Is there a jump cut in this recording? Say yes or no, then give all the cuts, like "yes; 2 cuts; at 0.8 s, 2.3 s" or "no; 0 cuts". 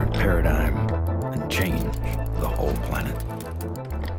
no; 0 cuts